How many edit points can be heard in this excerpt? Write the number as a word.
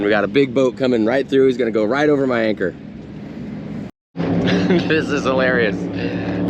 one